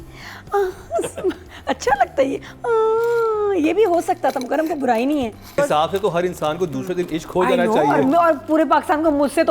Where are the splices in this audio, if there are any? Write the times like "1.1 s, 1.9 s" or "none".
5.5 s